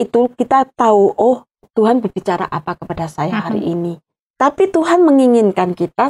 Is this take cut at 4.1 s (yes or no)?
yes